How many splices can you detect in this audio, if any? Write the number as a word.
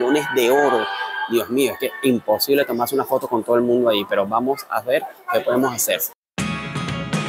zero